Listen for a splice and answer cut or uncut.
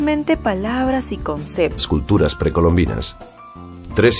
uncut